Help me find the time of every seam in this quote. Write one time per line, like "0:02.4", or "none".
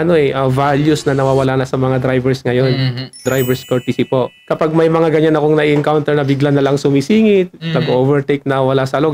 0:03.2
0:04.4